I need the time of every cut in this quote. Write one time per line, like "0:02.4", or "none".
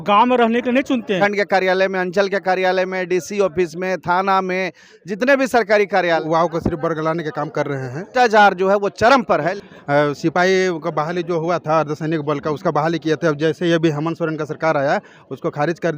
0:01.2
0:06.2
0:08.1
0:09.5